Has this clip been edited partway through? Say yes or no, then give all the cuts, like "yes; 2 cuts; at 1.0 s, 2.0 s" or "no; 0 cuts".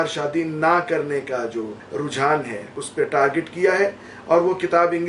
yes; 2 cuts; at 1.8 s, 2.8 s